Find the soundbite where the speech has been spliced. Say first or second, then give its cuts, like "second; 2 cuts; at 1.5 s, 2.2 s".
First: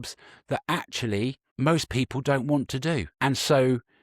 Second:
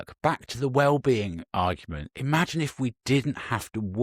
first; 2 cuts; at 1.4 s, 3.1 s